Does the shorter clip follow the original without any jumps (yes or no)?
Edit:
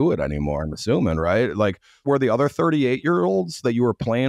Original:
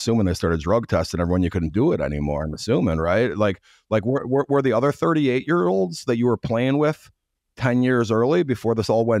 no